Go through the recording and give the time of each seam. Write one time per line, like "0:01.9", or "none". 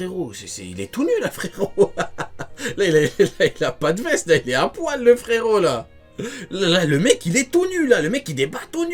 none